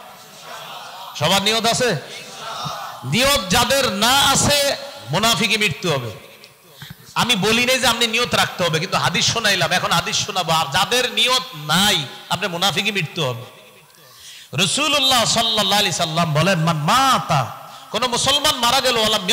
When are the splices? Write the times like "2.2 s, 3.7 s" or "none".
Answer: none